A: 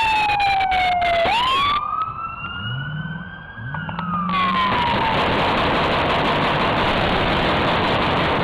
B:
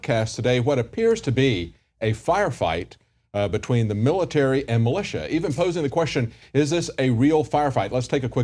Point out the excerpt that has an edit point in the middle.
B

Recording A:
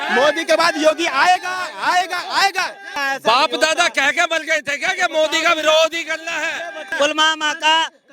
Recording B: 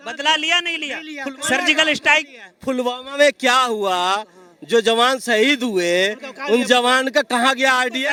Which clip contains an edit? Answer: A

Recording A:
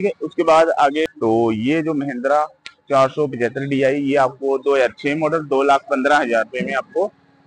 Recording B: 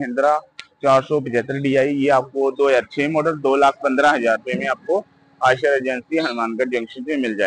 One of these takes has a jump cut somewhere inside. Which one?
A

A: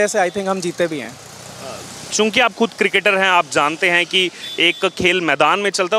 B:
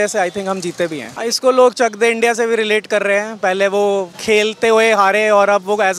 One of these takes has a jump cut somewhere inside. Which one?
B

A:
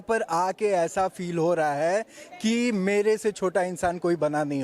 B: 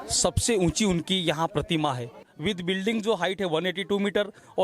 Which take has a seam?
B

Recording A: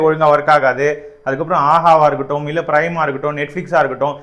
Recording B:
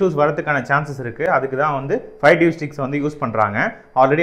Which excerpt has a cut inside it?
B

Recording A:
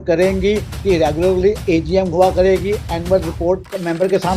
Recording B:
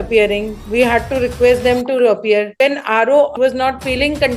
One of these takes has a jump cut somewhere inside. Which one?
B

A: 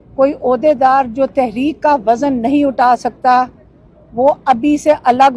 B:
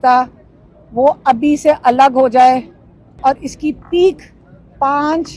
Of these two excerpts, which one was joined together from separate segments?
B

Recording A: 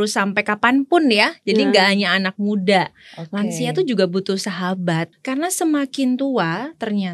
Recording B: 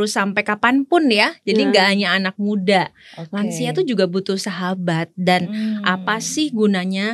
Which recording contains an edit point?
A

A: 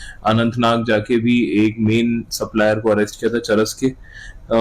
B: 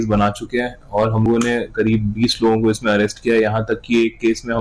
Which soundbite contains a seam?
B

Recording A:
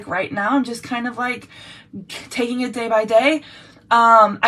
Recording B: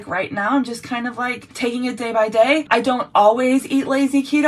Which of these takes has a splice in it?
B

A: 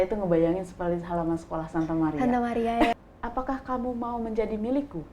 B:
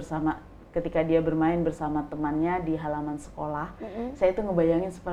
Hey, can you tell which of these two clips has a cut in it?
A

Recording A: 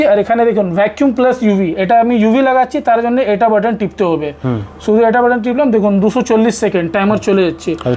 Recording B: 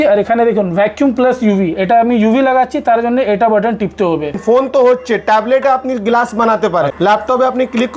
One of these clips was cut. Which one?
B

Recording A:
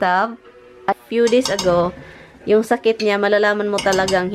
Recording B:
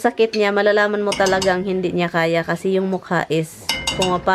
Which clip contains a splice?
A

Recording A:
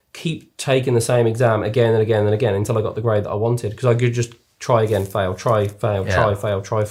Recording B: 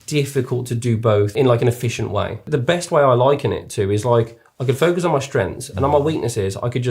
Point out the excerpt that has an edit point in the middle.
B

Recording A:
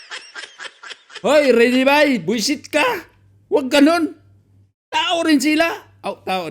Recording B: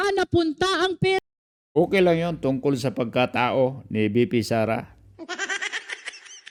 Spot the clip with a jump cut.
A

